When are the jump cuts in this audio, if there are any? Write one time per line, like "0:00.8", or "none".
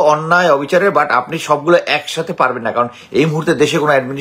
none